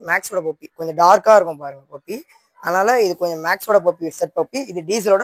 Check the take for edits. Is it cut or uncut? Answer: uncut